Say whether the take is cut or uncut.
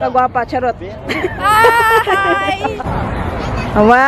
cut